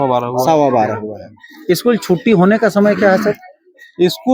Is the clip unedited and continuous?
yes; 0 cuts

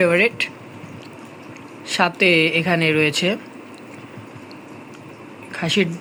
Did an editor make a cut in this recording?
no; 0 cuts

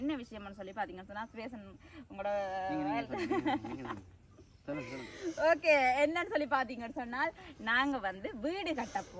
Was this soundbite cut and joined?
no; 0 cuts

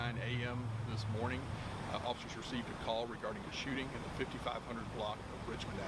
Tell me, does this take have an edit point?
yes; 1 cut; at 4.6 s

